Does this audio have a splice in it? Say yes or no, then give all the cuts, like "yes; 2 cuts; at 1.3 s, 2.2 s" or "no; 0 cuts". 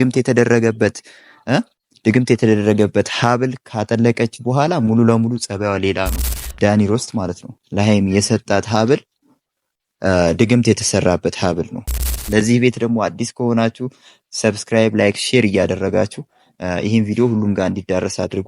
yes; 2 cuts; at 6.5 s, 12.1 s